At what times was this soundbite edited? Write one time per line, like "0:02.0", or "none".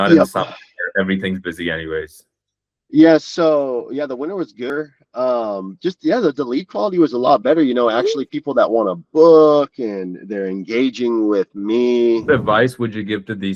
0:04.7
0:12.3